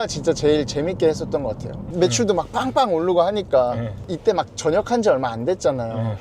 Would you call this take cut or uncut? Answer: uncut